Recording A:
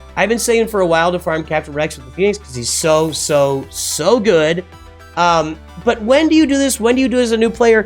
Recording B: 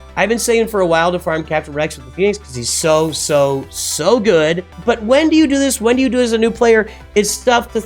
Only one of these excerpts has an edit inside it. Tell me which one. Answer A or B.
B